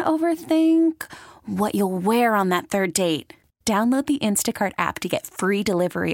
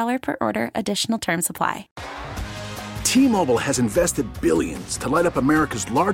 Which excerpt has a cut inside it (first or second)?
second